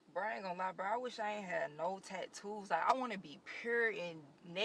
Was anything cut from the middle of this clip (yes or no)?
no